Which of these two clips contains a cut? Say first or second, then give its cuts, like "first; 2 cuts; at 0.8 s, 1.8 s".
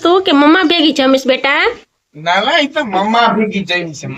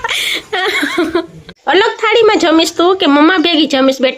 second; 1 cut; at 1.6 s